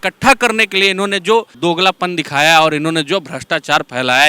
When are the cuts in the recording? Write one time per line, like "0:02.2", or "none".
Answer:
0:01.5